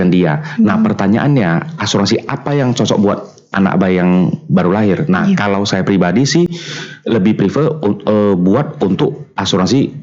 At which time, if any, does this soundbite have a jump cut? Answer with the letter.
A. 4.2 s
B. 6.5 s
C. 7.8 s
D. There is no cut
D